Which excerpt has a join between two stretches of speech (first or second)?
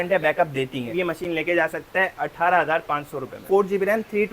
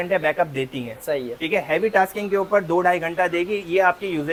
first